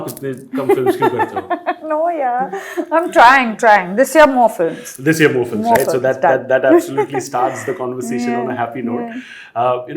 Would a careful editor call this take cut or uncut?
uncut